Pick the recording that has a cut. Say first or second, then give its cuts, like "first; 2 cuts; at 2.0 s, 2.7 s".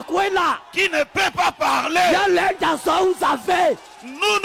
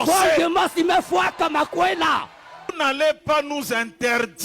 second; 1 cut; at 2.7 s